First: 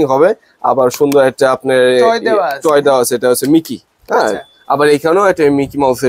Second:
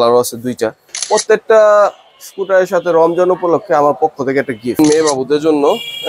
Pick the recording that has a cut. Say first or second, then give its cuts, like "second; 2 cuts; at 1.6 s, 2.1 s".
second; 2 cuts; at 0.9 s, 4.7 s